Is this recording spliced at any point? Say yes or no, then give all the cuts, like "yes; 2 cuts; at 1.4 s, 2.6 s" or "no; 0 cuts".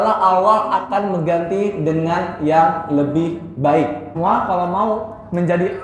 yes; 1 cut; at 4.1 s